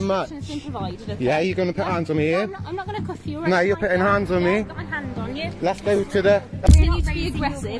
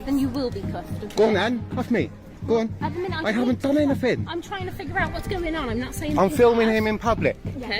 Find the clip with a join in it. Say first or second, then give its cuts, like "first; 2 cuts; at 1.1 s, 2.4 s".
first; 1 cut; at 6.7 s